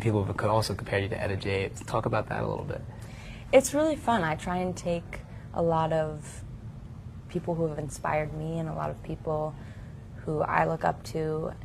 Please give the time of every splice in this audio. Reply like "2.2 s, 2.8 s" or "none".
2.8 s